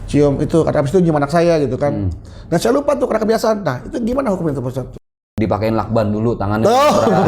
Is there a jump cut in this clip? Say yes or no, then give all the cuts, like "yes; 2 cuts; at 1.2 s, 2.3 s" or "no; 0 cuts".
yes; 1 cut; at 5.0 s